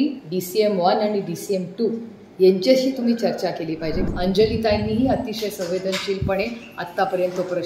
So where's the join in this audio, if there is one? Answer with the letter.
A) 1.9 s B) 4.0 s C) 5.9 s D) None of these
B